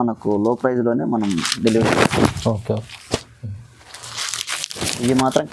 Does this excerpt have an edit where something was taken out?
no; 0 cuts

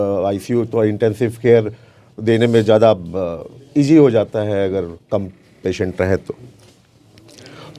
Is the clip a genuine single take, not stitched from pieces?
yes; 0 cuts

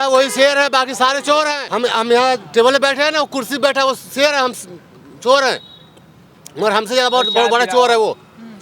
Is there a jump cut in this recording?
yes; 1 cut; at 1.6 s

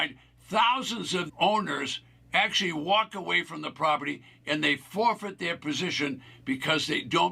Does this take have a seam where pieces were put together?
yes; 1 cut; at 1.3 s

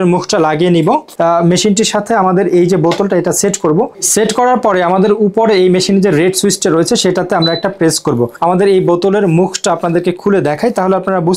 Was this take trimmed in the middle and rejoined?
yes; 2 cuts; at 1.1 s, 8.3 s

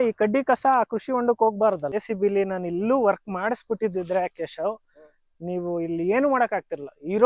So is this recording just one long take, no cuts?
no; 1 cut; at 1.9 s

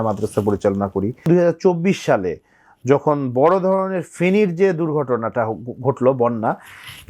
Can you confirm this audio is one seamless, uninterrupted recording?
no; 1 cut; at 1.3 s

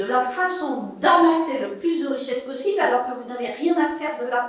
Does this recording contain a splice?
no; 0 cuts

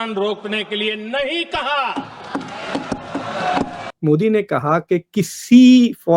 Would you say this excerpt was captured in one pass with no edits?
no; 1 cut; at 3.8 s

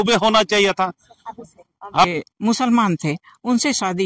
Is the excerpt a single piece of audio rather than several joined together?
no; 1 cut; at 2.1 s

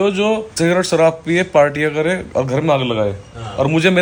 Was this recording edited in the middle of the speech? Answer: no; 0 cuts

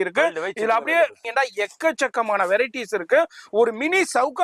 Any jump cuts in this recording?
yes; 1 cut; at 1.2 s

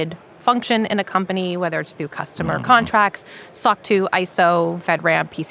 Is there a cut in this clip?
no; 0 cuts

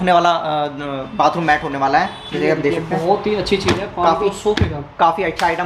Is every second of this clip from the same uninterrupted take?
yes; 0 cuts

